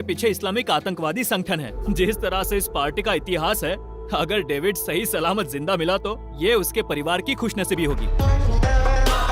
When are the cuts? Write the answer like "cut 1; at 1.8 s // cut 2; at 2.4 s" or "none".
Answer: cut 1; at 1.7 s // cut 2; at 8.1 s